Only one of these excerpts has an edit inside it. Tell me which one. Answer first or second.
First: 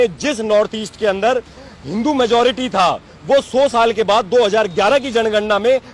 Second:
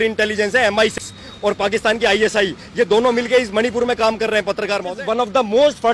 second